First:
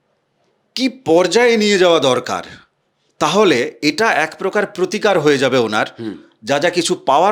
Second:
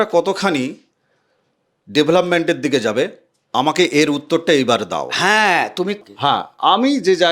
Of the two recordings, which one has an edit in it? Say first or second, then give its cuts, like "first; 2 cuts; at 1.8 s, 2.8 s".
second; 1 cut; at 6.0 s